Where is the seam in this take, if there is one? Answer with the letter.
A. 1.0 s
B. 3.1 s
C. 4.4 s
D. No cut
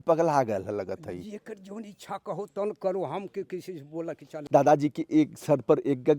C